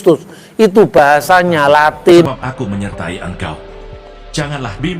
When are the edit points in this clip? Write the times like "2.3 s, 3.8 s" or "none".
2.3 s

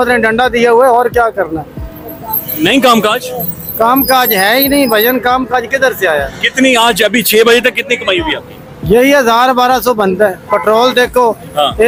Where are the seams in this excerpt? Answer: none

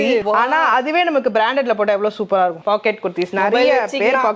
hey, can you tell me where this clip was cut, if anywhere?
2.6 s

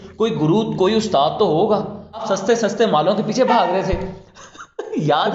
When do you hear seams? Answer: 2.2 s

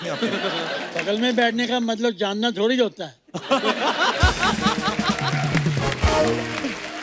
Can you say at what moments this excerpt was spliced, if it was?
none

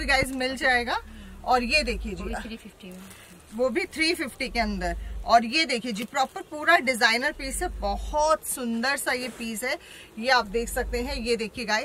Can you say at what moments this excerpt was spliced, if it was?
none

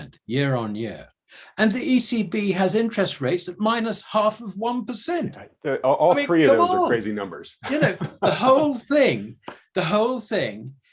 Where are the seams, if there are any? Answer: none

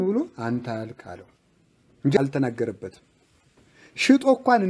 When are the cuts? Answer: 2.2 s

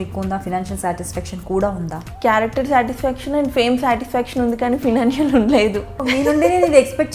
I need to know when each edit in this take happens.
2.0 s, 6.0 s

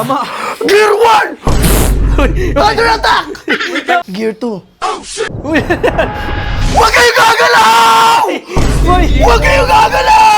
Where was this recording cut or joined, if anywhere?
4.1 s, 5.3 s

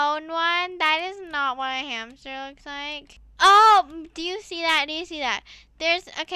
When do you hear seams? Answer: 3.2 s

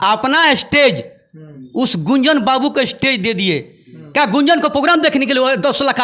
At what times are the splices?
none

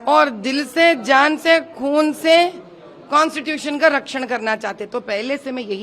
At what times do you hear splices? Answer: none

